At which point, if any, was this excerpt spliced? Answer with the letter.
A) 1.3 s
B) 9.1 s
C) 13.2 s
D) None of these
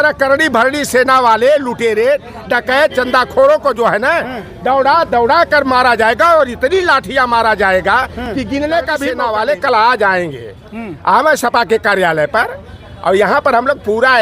B